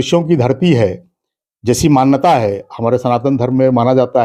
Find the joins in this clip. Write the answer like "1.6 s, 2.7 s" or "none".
none